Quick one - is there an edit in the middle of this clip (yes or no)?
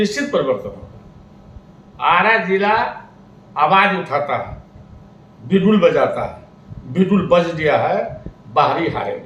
no